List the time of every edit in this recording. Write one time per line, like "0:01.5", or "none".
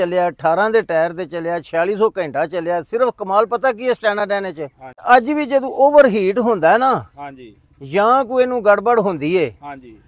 0:05.0

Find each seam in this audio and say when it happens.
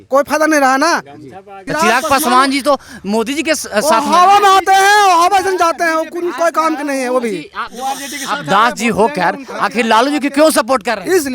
0:01.6

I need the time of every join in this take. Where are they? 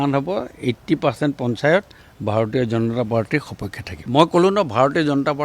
none

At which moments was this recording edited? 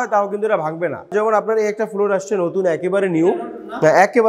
0:01.1

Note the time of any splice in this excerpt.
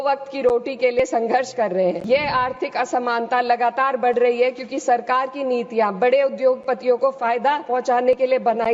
0:02.0

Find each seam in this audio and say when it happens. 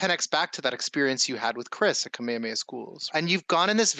0:03.1

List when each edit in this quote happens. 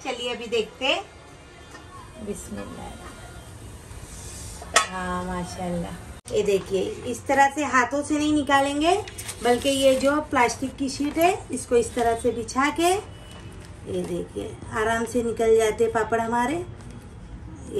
0:06.1

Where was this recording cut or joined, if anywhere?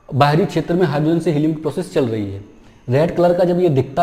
none

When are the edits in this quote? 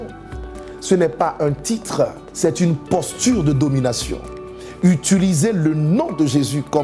0:02.2

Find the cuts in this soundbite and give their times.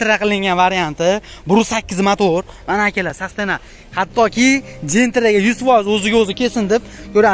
none

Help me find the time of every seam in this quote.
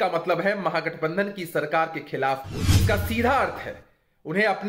0:02.7

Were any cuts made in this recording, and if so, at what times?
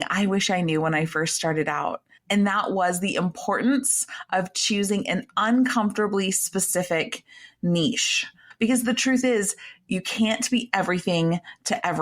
0:02.1
0:08.4

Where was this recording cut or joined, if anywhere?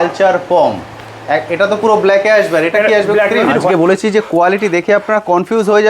0:03.7

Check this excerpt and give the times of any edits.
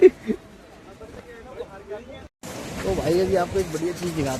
0:02.2

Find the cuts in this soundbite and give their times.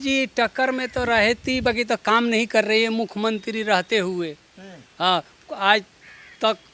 none

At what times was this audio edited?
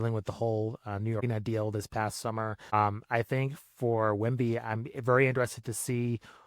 0:01.2
0:02.7

